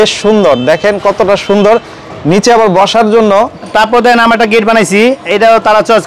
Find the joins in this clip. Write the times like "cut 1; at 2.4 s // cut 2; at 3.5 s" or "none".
cut 1; at 3.7 s